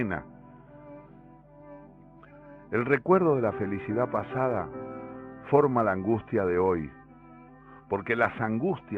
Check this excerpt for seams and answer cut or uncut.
uncut